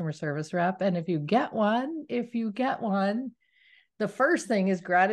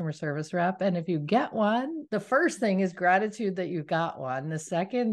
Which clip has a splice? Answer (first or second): second